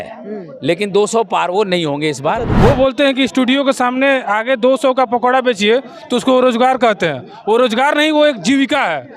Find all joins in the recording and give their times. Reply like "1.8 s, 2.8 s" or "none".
2.5 s

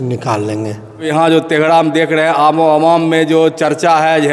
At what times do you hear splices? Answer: 1.0 s

